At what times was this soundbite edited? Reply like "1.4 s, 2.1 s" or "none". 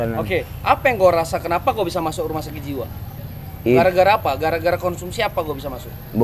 none

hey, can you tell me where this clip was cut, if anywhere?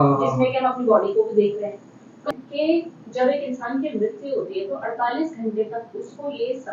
2.3 s

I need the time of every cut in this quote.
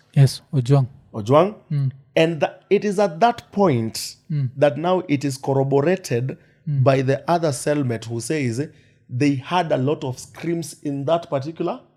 none

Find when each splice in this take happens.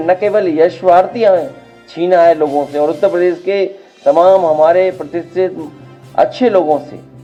none

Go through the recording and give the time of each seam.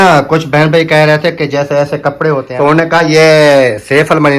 2.5 s

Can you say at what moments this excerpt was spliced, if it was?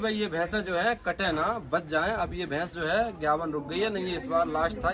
none

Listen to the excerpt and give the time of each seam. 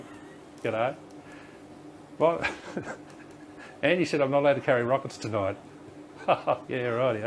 none

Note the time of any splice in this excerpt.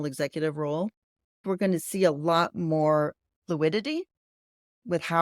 1.4 s

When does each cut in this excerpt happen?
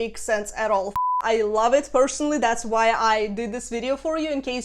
1.0 s

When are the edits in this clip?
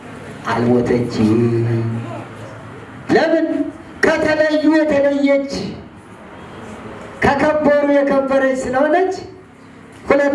none

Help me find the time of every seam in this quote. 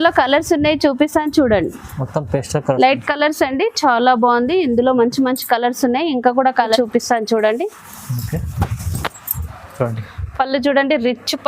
6.8 s

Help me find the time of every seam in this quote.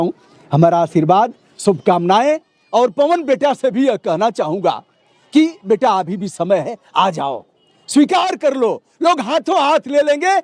none

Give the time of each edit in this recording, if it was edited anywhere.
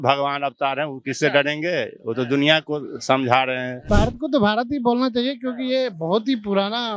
3.7 s

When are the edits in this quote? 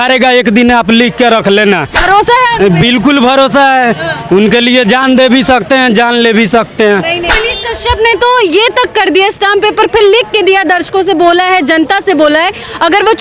2.0 s, 7.3 s

